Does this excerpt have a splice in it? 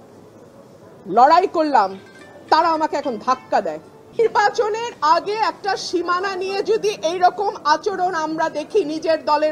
yes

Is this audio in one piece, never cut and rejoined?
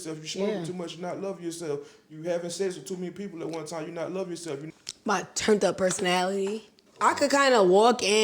no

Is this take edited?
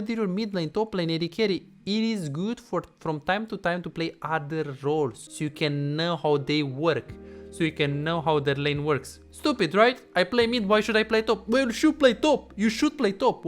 yes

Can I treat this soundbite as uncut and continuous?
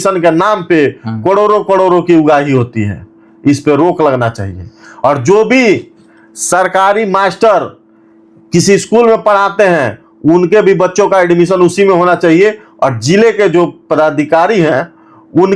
yes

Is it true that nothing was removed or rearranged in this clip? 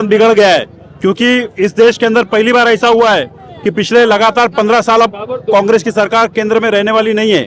yes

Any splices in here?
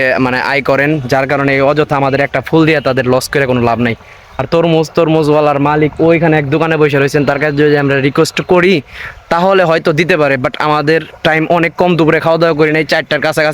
no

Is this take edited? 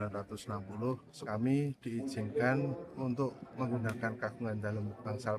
yes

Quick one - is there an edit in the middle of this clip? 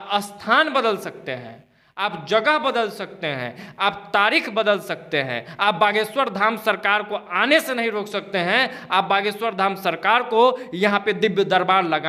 no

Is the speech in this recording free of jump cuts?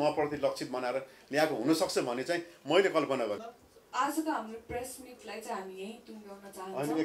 no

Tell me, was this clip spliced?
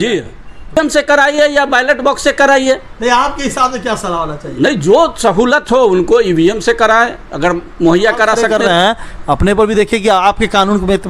yes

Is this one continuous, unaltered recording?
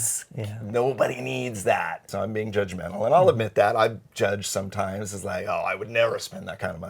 no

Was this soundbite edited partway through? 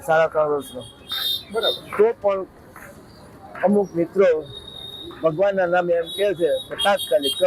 no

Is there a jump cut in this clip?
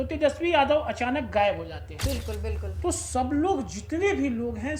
yes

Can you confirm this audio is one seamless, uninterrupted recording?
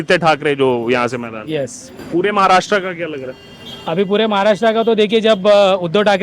yes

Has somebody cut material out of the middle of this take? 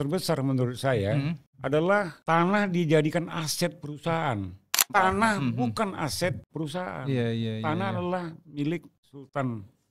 yes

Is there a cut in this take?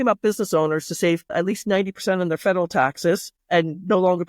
yes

